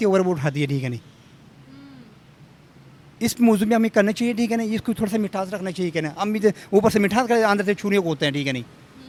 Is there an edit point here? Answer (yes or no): no